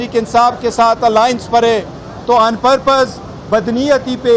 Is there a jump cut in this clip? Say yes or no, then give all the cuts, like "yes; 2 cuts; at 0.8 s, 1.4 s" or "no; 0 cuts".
no; 0 cuts